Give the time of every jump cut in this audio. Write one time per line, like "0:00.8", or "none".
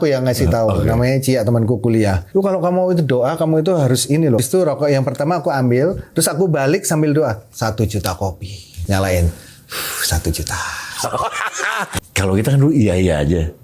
0:02.2
0:04.4
0:08.7
0:11.9